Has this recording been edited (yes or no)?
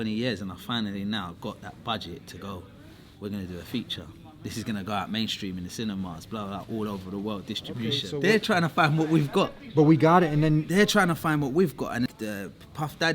yes